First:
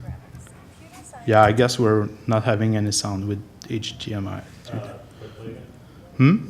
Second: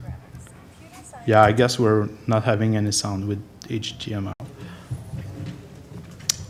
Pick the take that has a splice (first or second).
first